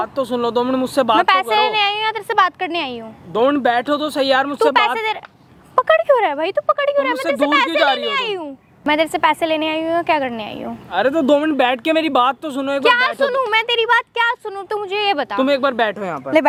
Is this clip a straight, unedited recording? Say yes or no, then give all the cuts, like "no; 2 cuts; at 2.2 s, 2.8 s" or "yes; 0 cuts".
yes; 0 cuts